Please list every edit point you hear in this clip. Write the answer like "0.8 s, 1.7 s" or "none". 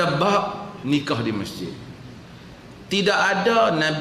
none

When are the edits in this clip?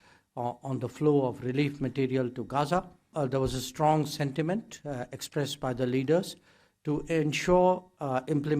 3.1 s

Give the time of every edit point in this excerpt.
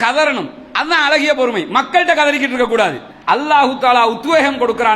3.1 s

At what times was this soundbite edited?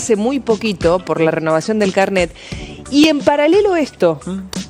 none

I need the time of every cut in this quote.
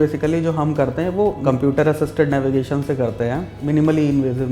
1.4 s, 3.6 s

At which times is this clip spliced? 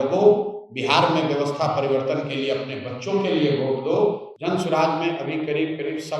4.3 s

